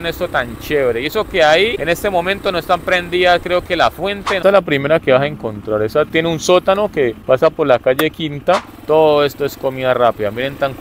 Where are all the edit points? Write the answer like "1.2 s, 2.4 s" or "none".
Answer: 1.8 s, 4.4 s, 6.1 s, 7.2 s, 8.7 s